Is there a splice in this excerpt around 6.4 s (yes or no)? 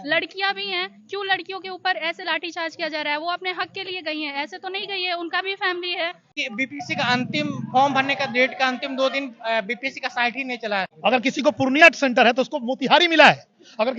yes